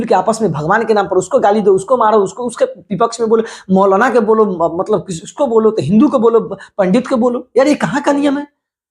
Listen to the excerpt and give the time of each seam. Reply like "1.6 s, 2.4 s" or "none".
none